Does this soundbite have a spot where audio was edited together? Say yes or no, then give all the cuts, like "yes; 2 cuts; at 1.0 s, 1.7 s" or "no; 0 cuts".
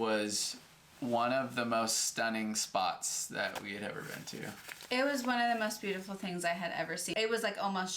yes; 1 cut; at 7.1 s